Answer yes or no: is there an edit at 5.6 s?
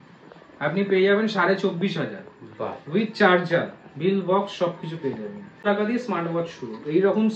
yes